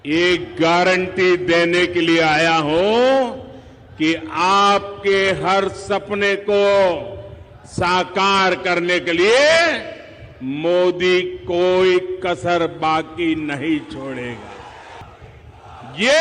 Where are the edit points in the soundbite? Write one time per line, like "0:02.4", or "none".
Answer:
0:15.0